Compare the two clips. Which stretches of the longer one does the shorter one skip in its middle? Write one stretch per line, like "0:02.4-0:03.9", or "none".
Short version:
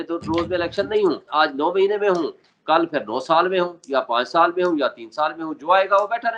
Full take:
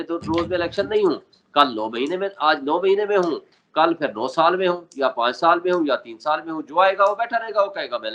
0:01.3-0:02.3